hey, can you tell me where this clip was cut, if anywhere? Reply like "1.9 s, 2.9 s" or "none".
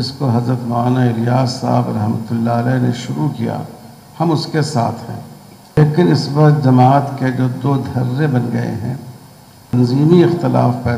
5.8 s, 9.7 s